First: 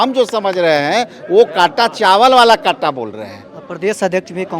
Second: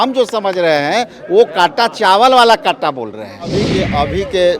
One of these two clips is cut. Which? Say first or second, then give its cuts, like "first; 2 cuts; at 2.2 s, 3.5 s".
second; 1 cut; at 3.5 s